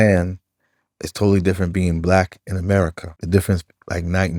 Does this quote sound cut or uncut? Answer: cut